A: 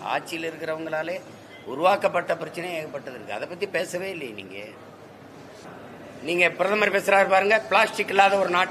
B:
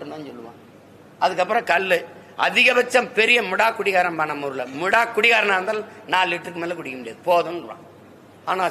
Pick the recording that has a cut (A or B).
A